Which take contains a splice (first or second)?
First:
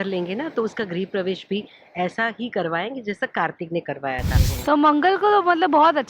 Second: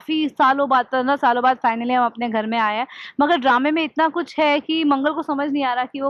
first